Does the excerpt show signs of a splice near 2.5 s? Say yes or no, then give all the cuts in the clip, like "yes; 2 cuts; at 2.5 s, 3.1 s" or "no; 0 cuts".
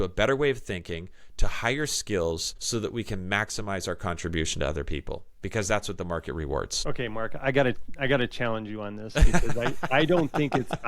yes; 2 cuts; at 2.5 s, 6.7 s